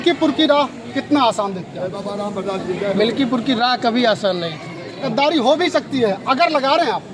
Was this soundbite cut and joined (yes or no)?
yes